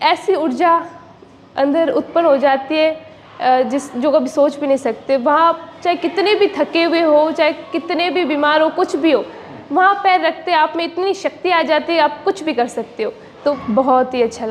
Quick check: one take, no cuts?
no; 1 cut; at 13.6 s

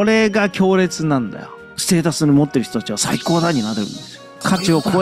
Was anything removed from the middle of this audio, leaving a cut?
yes; 1 cut; at 1.6 s

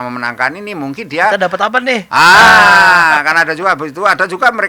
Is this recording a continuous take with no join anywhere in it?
yes; 0 cuts

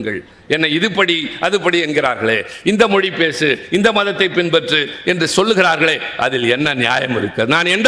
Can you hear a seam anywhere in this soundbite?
no; 0 cuts

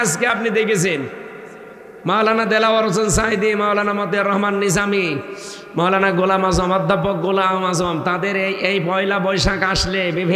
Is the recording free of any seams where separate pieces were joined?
yes; 0 cuts

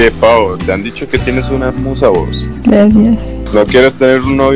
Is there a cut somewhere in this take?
yes; 2 cuts; at 2.4 s, 3.3 s

